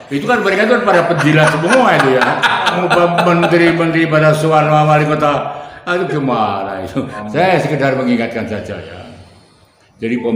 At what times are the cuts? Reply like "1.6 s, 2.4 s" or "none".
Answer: 2.7 s, 7.2 s